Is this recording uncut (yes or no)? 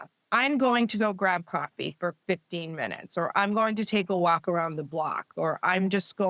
yes